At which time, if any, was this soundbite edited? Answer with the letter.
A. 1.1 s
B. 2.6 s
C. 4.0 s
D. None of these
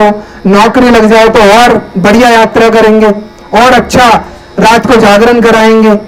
D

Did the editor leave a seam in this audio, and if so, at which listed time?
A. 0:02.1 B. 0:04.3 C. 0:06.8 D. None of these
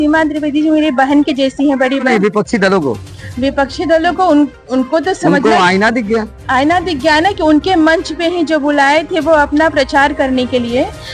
A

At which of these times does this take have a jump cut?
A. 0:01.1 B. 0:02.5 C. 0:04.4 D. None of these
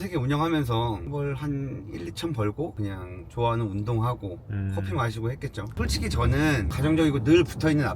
A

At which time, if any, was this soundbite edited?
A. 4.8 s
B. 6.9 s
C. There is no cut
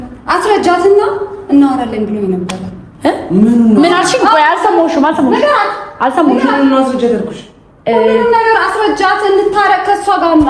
A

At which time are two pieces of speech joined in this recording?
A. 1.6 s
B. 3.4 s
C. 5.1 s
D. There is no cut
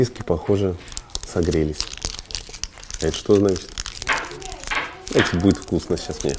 D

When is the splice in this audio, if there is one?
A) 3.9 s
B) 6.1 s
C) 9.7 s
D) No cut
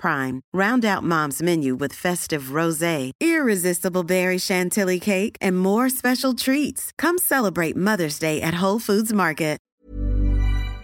C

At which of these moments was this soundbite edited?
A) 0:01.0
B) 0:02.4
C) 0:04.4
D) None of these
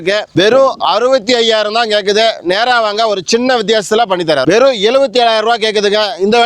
C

